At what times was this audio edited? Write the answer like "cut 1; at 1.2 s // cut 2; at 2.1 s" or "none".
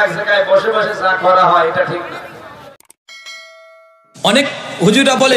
cut 1; at 2.7 s